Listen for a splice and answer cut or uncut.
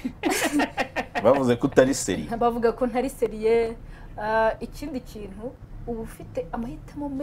uncut